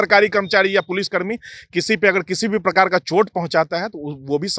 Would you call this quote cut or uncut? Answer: uncut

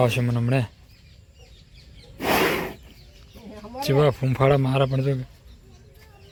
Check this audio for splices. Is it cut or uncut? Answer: uncut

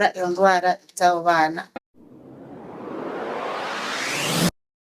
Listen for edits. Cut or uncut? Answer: cut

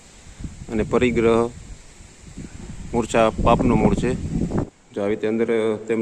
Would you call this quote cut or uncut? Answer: cut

